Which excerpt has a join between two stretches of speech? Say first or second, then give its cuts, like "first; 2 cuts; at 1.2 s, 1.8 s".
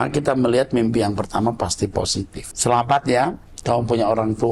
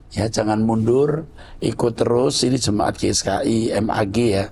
first; 1 cut; at 2.4 s